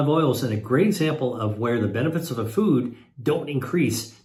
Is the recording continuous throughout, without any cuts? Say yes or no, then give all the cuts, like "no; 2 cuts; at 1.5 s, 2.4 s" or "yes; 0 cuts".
yes; 0 cuts